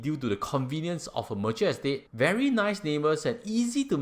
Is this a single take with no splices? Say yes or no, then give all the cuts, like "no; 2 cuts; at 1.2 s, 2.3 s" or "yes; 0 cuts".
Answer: no; 1 cut; at 2.1 s